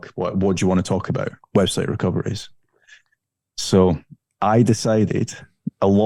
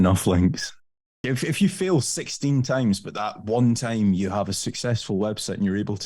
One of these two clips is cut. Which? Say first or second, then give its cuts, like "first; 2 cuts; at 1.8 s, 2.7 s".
second; 1 cut; at 1.2 s